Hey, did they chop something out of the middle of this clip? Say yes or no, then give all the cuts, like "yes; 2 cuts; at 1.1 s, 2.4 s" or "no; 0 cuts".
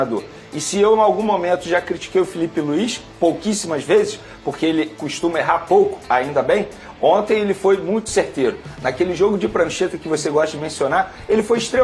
no; 0 cuts